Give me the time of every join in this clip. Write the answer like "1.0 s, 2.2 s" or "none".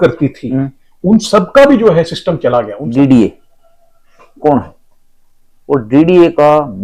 2.8 s